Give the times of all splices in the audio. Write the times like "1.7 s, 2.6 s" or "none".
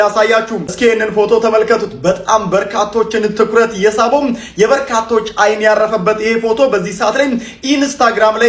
none